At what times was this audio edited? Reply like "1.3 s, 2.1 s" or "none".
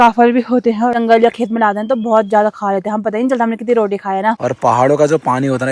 0.9 s, 4.3 s